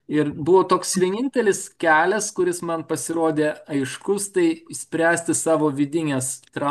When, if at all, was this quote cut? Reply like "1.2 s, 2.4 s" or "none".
none